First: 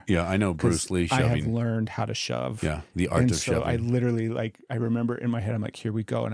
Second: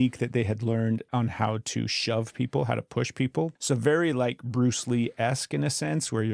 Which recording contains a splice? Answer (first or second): second